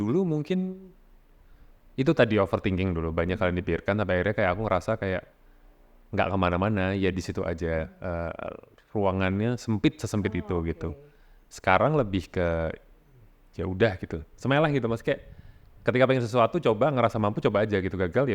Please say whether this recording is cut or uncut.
uncut